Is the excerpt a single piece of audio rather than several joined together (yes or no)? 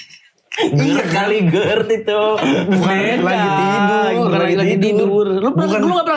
yes